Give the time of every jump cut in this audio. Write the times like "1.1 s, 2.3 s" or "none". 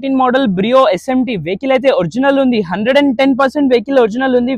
none

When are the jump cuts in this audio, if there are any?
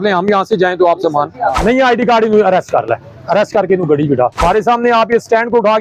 1.6 s, 4.4 s

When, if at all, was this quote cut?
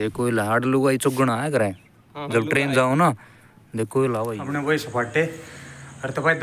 4.1 s

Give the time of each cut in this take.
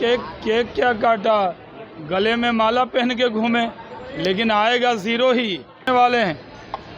5.9 s

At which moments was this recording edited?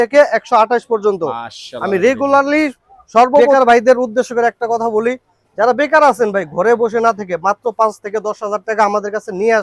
3.5 s

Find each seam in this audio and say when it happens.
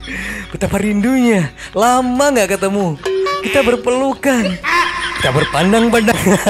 none

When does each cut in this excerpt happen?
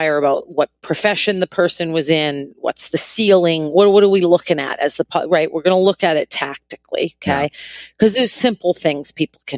none

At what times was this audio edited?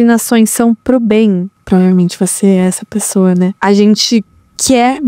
1.5 s, 3.6 s

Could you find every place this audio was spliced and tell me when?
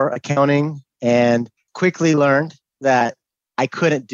none

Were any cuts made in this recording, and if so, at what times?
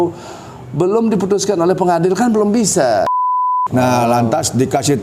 3.2 s

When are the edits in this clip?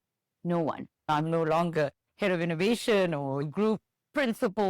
1.0 s

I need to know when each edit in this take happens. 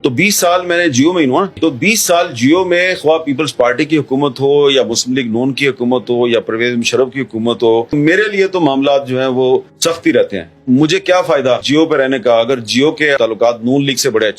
1.5 s, 9.7 s, 11.6 s, 13.2 s

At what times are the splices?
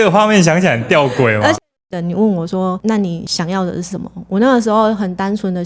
1.5 s, 3.2 s

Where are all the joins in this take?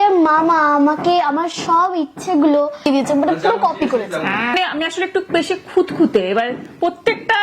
2.9 s, 4.5 s

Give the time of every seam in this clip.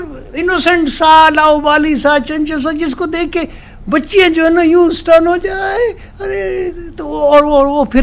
none

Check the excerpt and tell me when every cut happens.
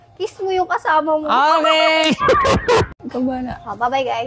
2.9 s

